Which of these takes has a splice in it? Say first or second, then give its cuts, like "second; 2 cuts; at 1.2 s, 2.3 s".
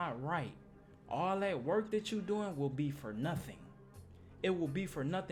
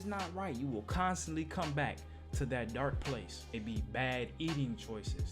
second; 1 cut; at 3.6 s